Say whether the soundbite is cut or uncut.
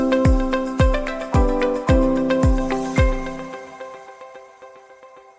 uncut